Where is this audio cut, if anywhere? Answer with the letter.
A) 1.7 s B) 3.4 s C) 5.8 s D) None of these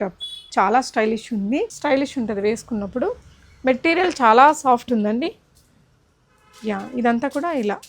A